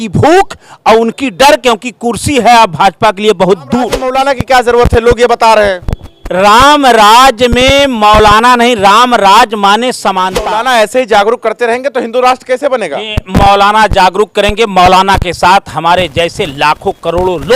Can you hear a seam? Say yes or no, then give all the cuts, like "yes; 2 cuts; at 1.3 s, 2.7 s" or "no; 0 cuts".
yes; 2 cuts; at 4.0 s, 10.3 s